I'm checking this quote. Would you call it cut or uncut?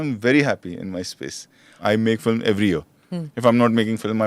cut